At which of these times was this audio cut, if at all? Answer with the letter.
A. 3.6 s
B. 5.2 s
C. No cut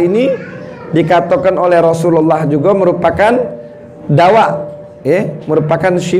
C